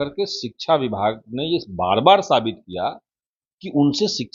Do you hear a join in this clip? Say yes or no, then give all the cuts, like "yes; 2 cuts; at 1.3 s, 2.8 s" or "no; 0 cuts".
no; 0 cuts